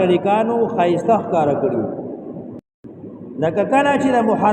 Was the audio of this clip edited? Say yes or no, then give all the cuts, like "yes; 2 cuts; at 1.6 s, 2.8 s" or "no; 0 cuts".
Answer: yes; 1 cut; at 2.7 s